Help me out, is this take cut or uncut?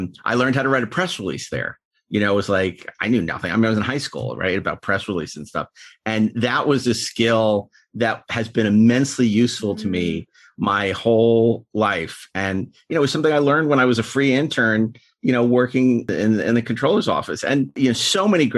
cut